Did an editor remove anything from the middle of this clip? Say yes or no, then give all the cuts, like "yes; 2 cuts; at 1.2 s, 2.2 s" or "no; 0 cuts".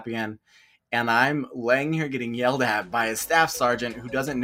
no; 0 cuts